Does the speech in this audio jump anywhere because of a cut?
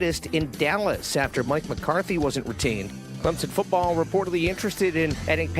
yes; 1 cut; at 3.0 s

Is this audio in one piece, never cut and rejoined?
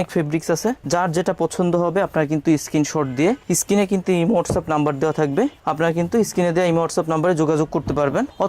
yes; 0 cuts

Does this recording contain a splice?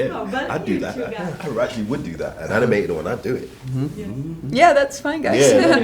yes; 1 cut; at 1.1 s

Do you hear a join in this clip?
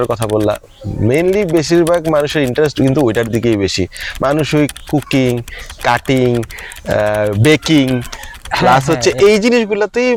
no; 0 cuts

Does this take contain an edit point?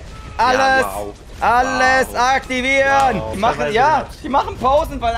yes; 1 cut; at 3.3 s

